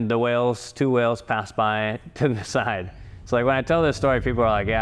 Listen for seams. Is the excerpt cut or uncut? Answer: uncut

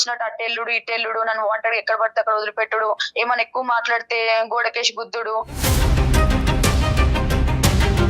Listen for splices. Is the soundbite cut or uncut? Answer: uncut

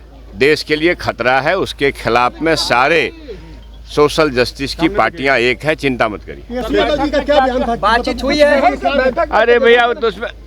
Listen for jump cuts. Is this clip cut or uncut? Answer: uncut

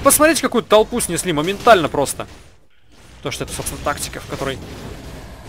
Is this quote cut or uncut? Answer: cut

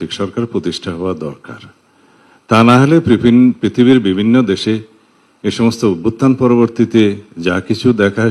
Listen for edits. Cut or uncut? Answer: uncut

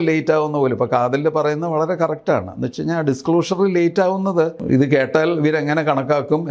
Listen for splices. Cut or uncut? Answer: cut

